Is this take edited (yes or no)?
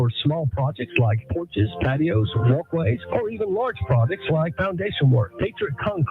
no